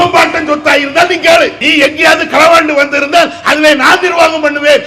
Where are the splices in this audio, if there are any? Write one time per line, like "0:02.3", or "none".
0:01.6

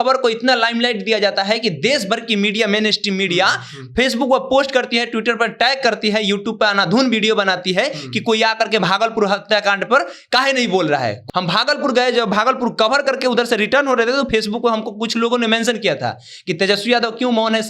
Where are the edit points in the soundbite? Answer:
0:11.2

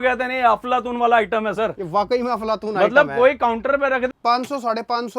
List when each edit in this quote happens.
0:04.1

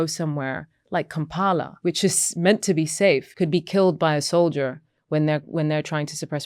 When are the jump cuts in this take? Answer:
0:01.7
0:03.3

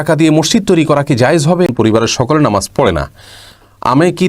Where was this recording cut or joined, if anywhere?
0:01.7

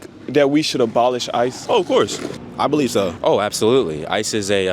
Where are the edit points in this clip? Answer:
0:01.6
0:02.3
0:03.2

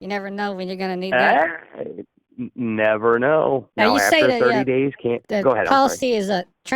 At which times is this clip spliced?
0:03.7

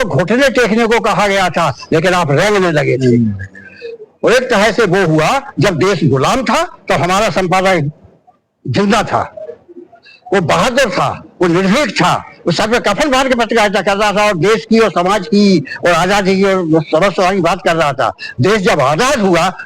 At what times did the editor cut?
none

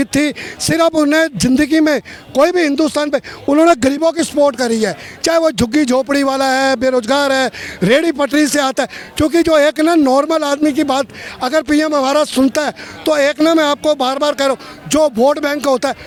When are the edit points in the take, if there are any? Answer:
none

